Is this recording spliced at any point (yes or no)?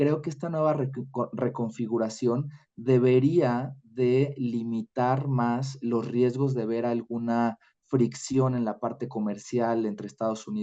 no